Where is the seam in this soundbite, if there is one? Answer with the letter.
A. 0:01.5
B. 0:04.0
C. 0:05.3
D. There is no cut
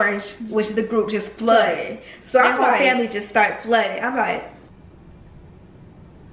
D